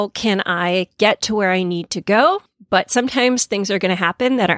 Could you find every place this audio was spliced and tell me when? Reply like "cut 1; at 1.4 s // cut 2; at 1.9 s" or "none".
cut 1; at 2.5 s